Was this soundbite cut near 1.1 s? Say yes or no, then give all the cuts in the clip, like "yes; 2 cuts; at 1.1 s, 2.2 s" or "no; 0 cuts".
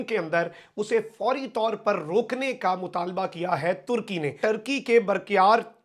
no; 1 cut; at 4.4 s